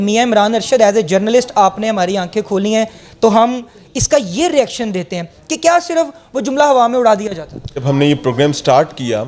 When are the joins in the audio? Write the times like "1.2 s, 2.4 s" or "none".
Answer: 7.8 s